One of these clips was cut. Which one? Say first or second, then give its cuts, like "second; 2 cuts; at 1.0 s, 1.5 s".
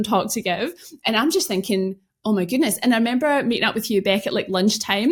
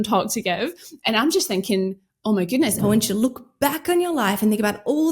second; 1 cut; at 2.8 s